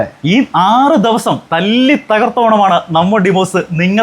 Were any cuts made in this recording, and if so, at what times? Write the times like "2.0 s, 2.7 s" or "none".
1.4 s